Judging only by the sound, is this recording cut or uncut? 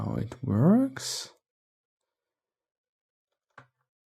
uncut